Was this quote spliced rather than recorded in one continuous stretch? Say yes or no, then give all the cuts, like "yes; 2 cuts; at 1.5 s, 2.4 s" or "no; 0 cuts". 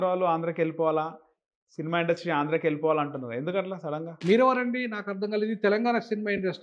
yes; 1 cut; at 4.1 s